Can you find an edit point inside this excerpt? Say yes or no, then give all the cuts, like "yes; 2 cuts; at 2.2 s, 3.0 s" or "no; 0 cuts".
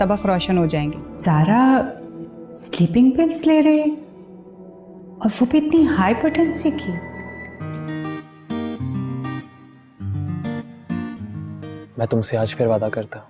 yes; 2 cuts; at 1.0 s, 7.5 s